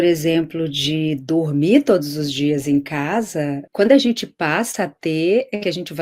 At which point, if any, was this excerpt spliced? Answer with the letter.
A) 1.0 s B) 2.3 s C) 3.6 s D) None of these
C